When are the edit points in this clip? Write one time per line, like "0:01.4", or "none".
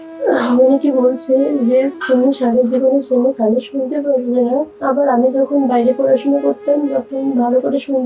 0:04.8